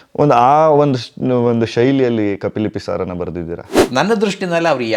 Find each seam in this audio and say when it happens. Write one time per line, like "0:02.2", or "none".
0:03.7

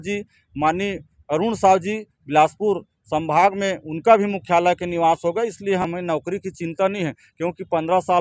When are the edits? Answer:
0:05.9

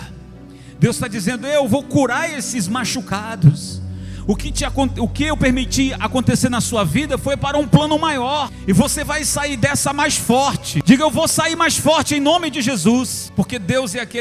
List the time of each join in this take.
0:08.5
0:10.7
0:13.2

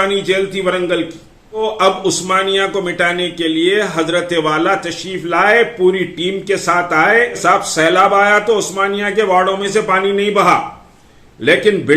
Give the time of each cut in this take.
0:01.6
0:07.4

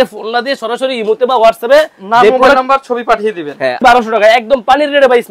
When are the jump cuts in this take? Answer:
0:03.8

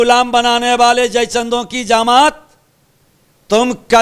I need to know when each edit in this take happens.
none

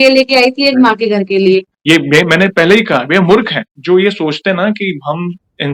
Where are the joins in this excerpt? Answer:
0:01.7

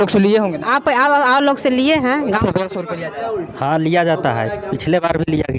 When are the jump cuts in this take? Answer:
0:02.4

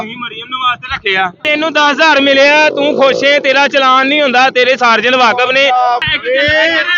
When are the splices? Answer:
0:01.5
0:06.0

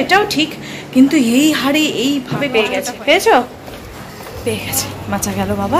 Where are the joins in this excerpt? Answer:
0:02.6

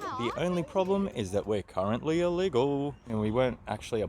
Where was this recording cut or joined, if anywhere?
0:03.0

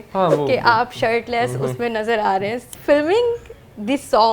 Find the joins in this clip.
0:02.6

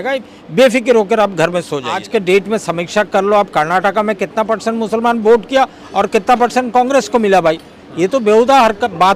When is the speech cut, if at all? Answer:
0:02.0

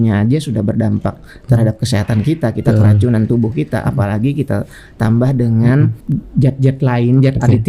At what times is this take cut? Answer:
0:06.0

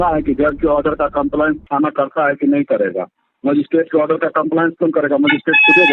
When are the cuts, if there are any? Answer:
none

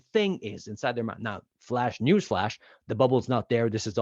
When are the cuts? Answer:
0:01.5

